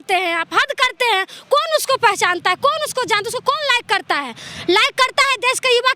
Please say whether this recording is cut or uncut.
uncut